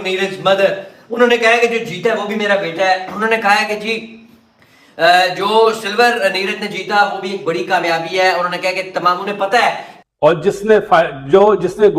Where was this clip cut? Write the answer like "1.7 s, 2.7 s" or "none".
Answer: 9.9 s